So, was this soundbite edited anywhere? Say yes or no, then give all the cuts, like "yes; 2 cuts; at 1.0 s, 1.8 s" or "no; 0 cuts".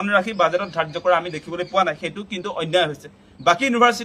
yes; 1 cut; at 1.0 s